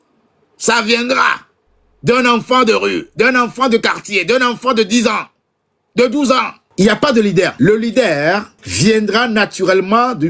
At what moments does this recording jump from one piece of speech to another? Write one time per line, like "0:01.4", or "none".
0:06.6
0:07.5
0:08.6